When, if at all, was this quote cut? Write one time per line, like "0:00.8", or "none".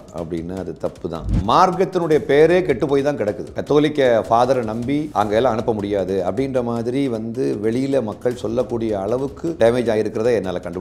0:01.3
0:03.5
0:05.1
0:09.5

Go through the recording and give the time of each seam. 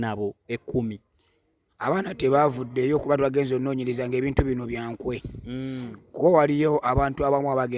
none

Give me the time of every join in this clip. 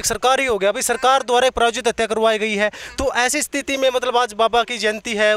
none

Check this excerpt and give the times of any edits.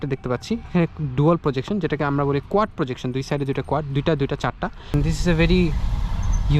0:04.9

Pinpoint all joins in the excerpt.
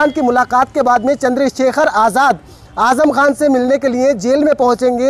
none

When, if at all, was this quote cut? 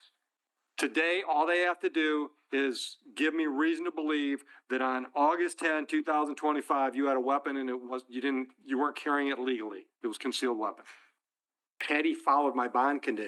0:11.8

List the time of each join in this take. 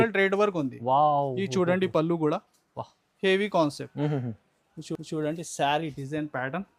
none

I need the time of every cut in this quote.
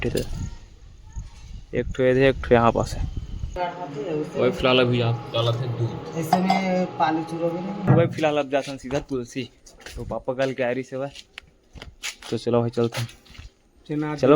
0:03.5
0:07.9

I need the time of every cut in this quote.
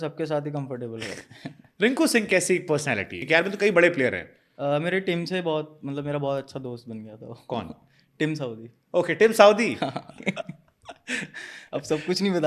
0:03.2
0:10.2

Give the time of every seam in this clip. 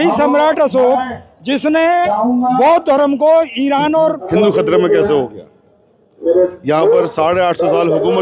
0:04.3

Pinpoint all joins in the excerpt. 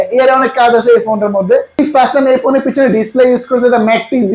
0:01.8

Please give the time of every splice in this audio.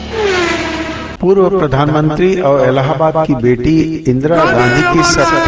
0:01.1

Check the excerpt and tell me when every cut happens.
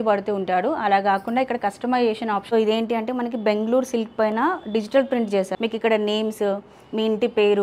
0:02.4
0:05.5

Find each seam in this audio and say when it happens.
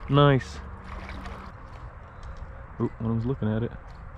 0:01.5

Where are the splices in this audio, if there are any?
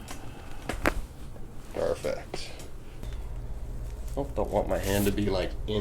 0:03.0

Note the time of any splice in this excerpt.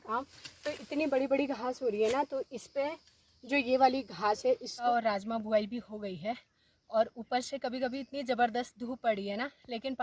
0:04.7

